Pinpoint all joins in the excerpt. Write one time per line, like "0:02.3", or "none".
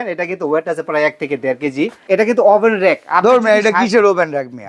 0:02.0